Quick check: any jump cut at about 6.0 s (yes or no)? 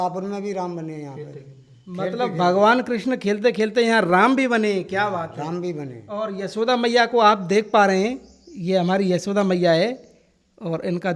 no